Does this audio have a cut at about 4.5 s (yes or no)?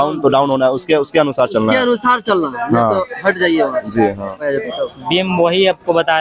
yes